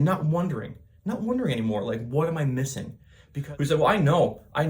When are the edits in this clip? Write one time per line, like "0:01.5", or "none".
0:03.4